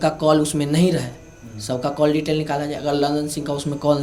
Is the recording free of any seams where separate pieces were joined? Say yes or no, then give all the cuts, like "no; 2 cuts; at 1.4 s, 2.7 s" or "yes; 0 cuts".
yes; 0 cuts